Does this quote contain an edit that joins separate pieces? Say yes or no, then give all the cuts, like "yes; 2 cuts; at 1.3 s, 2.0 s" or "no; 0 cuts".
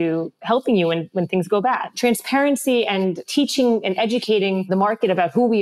yes; 3 cuts; at 1.9 s, 3.3 s, 4.7 s